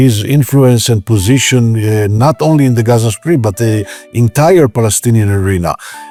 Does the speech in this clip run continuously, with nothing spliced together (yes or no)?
yes